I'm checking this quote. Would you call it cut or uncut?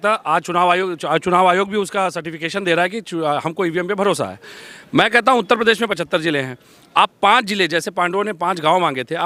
uncut